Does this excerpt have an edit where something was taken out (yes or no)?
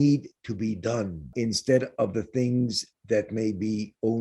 yes